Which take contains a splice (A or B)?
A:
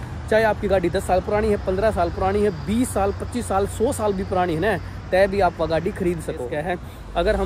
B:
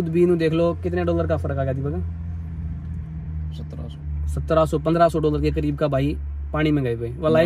A